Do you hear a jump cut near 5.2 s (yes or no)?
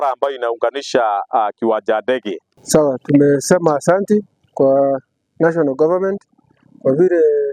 no